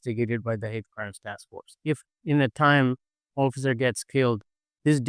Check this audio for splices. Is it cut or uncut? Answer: cut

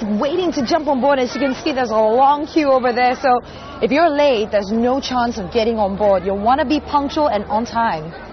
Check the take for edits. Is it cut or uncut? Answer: uncut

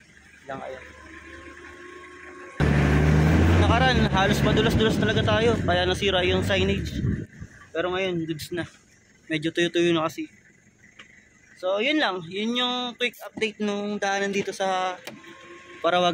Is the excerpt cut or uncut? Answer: cut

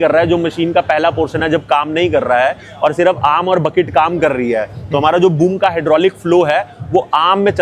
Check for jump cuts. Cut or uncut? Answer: uncut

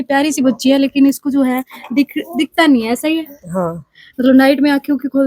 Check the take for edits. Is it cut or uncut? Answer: uncut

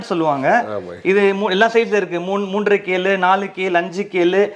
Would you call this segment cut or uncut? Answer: uncut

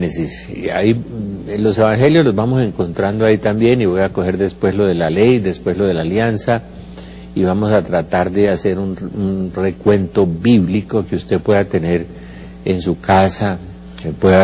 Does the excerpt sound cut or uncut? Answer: cut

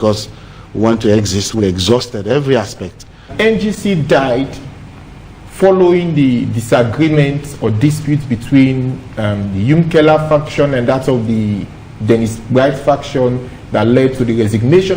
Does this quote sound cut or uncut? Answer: cut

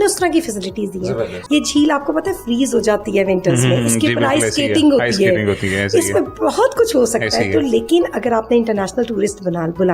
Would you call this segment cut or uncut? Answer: cut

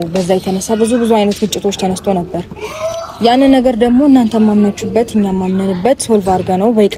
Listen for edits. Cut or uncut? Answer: uncut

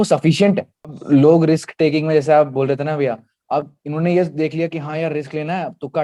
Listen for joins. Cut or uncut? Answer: cut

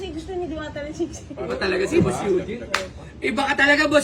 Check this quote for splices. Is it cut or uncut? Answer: cut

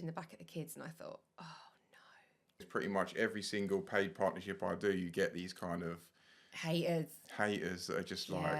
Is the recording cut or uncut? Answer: cut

